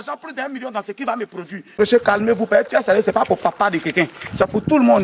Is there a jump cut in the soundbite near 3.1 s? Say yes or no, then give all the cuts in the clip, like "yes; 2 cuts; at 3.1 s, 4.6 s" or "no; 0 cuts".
no; 1 cut; at 1.7 s